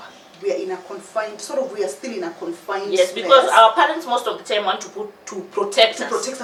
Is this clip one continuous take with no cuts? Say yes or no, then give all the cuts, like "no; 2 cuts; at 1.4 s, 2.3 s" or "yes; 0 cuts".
yes; 0 cuts